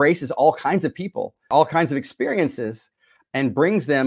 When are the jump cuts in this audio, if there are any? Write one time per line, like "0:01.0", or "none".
0:01.5